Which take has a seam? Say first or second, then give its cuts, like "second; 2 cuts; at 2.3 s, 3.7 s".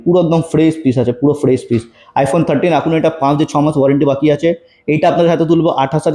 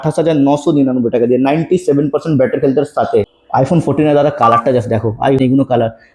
second; 2 cuts; at 3.4 s, 5.4 s